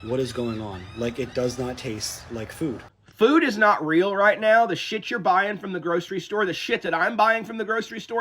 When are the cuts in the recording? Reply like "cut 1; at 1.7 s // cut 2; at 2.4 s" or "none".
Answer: cut 1; at 2.9 s